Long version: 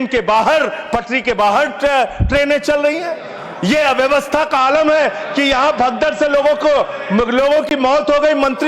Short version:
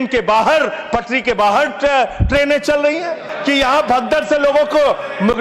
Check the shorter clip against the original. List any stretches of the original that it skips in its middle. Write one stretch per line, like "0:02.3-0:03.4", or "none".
0:03.3-0:05.2